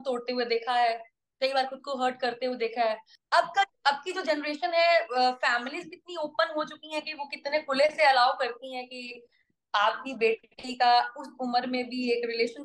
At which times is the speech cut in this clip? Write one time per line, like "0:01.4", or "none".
0:03.1